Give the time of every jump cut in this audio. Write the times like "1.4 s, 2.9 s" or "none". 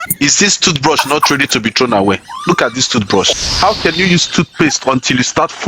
3.4 s